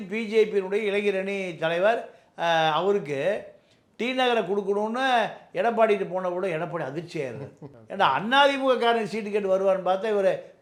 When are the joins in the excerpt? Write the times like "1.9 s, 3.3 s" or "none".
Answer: none